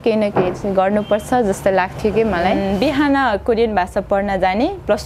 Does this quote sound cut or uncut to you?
cut